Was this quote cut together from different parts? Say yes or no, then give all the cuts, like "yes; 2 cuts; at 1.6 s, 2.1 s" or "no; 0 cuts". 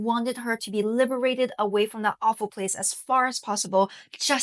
no; 0 cuts